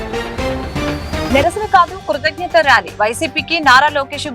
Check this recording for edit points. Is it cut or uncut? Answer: cut